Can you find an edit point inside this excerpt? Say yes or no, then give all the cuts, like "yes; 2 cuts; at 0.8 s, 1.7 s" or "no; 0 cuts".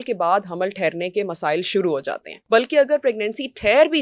yes; 1 cut; at 2.3 s